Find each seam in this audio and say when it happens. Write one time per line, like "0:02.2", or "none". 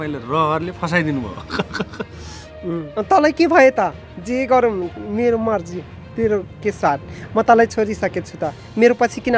0:03.0